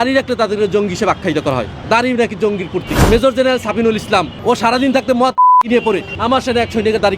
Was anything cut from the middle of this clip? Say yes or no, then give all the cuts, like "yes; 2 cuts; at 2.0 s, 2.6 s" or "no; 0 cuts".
yes; 4 cuts; at 1.7 s, 2.9 s, 4.3 s, 6.1 s